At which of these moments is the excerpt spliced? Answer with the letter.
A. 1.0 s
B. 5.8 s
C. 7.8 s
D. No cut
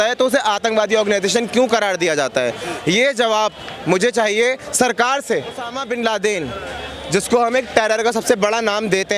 B